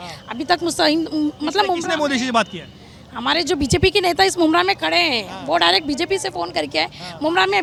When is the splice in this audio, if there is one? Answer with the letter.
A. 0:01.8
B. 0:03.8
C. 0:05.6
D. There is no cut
D